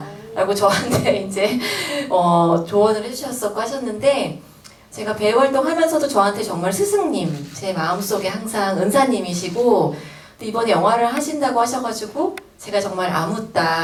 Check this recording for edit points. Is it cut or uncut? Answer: uncut